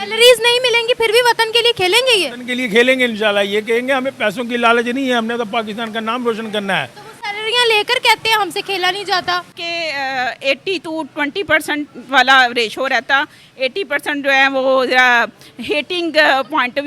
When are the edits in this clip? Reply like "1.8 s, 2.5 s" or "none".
9.6 s